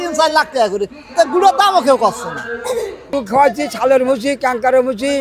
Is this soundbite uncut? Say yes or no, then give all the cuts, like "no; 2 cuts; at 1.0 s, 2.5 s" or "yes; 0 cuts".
no; 1 cut; at 3.0 s